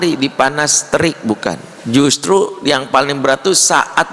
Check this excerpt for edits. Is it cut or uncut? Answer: cut